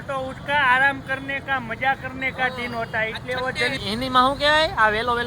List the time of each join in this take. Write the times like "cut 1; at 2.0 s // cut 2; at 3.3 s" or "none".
cut 1; at 3.8 s